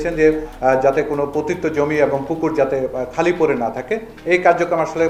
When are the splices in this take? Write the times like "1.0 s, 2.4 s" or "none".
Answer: none